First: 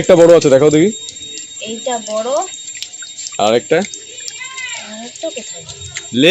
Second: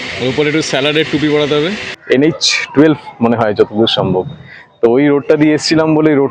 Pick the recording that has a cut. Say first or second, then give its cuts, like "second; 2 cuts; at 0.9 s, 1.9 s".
second; 1 cut; at 1.9 s